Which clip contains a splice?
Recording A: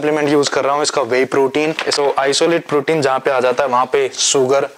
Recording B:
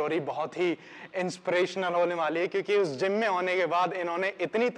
A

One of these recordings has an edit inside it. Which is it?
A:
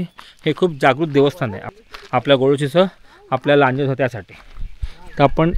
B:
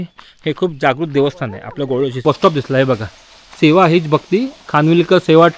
B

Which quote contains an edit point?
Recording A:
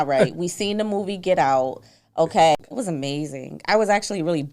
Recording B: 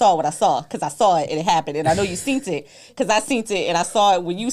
A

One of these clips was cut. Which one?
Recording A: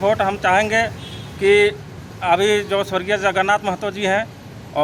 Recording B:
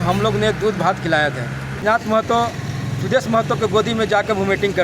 B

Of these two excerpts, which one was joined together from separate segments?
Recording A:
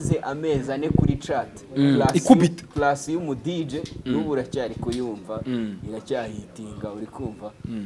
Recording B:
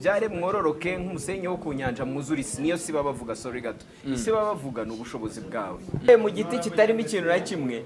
B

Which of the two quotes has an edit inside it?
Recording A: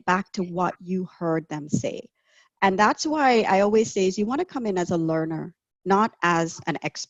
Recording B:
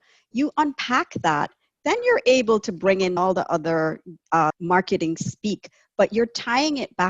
B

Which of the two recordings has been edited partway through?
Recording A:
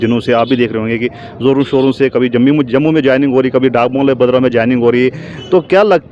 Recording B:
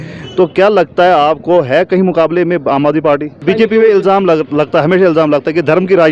B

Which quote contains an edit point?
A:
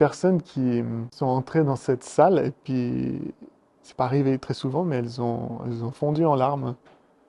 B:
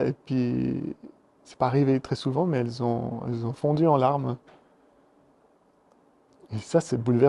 A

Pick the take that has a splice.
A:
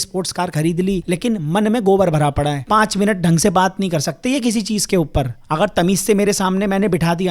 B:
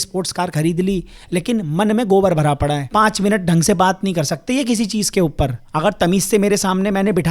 A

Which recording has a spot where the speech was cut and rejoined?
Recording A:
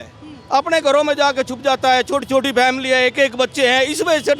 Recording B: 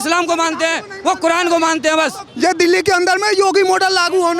B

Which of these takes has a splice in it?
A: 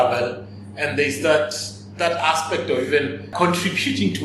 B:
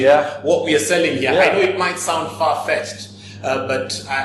A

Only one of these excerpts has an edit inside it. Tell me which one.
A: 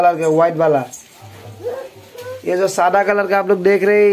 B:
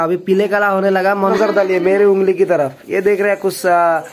B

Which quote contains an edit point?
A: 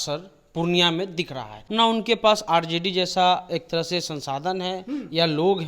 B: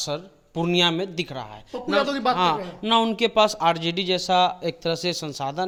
A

